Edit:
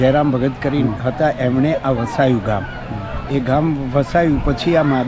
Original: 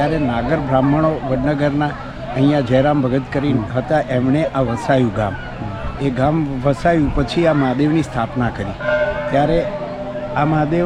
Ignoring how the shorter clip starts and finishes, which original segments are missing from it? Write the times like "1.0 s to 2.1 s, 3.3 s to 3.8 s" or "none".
none